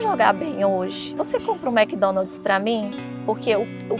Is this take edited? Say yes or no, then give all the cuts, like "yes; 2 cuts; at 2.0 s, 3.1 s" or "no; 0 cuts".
yes; 1 cut; at 1.2 s